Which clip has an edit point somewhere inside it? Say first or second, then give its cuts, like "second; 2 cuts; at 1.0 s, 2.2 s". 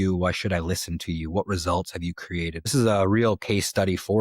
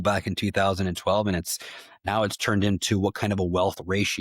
first; 1 cut; at 2.7 s